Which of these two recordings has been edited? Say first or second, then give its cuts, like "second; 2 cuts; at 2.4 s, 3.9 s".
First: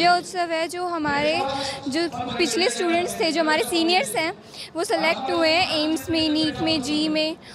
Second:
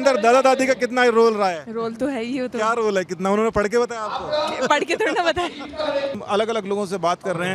second; 1 cut; at 6.2 s